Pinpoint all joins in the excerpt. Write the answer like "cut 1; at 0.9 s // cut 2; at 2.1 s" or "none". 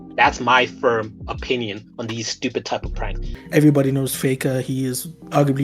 cut 1; at 3.3 s